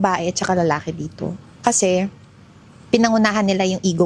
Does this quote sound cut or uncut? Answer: uncut